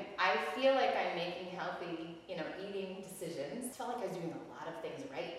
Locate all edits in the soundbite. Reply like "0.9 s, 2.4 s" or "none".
3.7 s